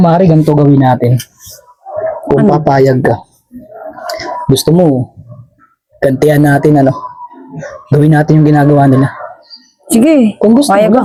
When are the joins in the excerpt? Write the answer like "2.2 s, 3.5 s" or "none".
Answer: none